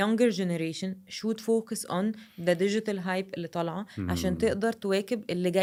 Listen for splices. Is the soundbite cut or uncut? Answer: uncut